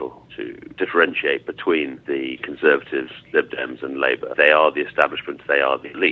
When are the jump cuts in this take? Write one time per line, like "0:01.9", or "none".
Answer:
none